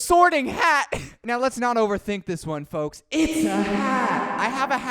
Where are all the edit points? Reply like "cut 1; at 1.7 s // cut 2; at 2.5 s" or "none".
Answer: cut 1; at 1.1 s